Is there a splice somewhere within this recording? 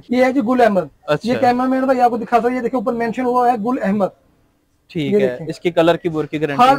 no; 0 cuts

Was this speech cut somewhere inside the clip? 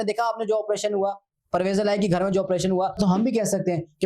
yes; 1 cut; at 3.0 s

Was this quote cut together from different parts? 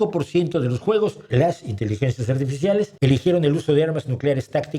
yes; 2 cuts; at 1.2 s, 2.9 s

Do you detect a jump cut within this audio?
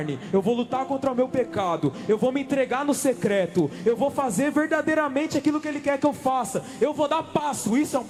no; 0 cuts

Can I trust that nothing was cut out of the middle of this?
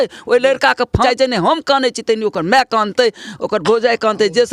no; 1 cut; at 1.0 s

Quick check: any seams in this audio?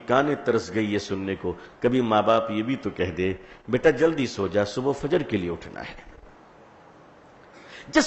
no; 0 cuts

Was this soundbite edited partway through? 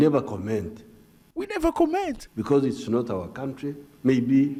no; 0 cuts

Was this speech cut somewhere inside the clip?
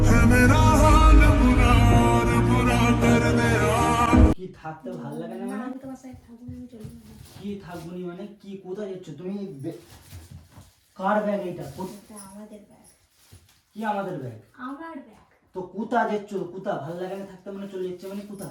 no; 0 cuts

